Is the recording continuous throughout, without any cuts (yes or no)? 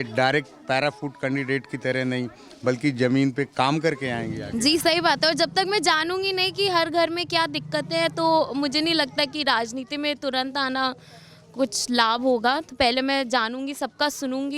yes